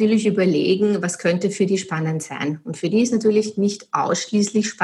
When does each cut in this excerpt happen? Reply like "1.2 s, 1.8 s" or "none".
none